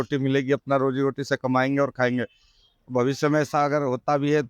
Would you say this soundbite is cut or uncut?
uncut